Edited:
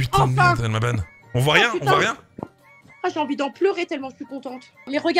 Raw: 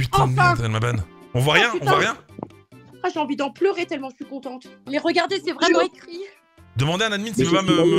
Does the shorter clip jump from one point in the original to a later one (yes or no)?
no